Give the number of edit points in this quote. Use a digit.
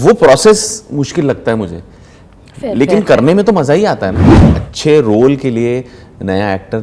1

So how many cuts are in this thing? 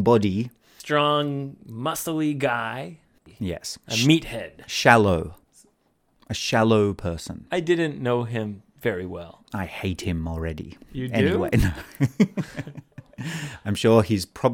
1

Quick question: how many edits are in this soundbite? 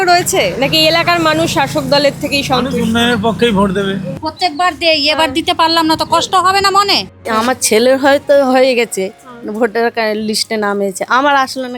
2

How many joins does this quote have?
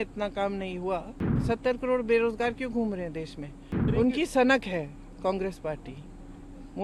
0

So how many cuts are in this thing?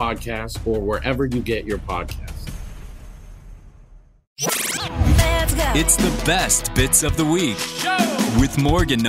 1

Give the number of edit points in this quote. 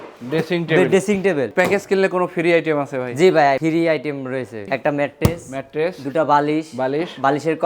3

